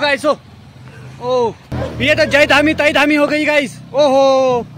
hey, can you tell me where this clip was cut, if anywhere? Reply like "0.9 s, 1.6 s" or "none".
1.7 s